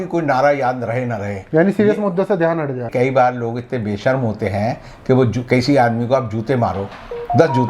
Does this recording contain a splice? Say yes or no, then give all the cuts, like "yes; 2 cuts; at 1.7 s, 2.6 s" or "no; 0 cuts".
yes; 1 cut; at 2.9 s